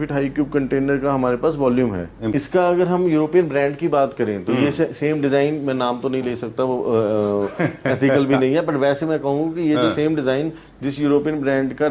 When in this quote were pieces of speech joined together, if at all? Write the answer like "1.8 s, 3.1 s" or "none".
2.3 s